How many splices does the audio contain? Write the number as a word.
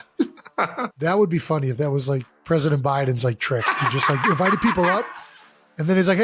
two